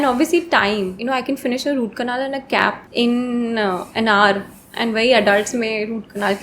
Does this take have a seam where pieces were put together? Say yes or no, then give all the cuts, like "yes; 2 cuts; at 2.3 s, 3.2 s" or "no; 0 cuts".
yes; 2 cuts; at 1.0 s, 2.8 s